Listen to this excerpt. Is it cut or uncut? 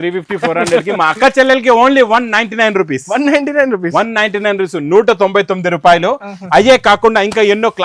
uncut